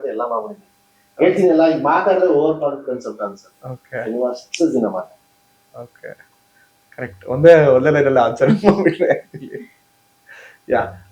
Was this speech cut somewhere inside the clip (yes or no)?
no